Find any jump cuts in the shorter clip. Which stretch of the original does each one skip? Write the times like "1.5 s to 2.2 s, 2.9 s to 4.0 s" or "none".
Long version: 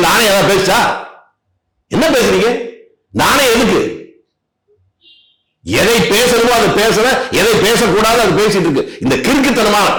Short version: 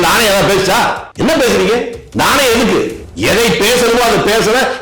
1.0 s to 1.8 s, 2.7 s to 3.0 s, 4.0 s to 5.5 s